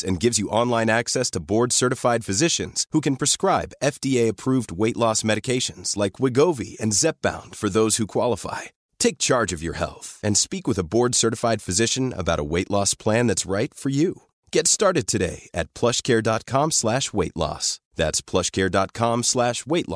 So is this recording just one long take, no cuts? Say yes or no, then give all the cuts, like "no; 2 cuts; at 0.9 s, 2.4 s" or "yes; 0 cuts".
yes; 0 cuts